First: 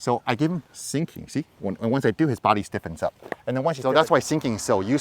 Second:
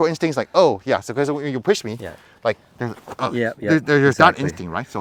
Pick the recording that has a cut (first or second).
first